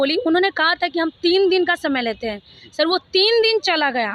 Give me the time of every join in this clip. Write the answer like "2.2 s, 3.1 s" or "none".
none